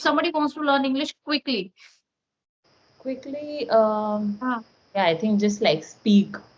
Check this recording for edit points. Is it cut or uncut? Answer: uncut